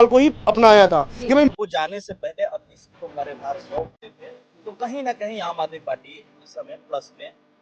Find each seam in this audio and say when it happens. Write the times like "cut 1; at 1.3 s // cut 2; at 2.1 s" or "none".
cut 1; at 1.5 s